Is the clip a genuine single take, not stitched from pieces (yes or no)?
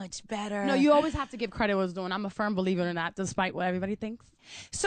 no